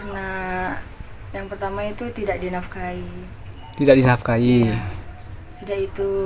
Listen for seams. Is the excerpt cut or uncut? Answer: uncut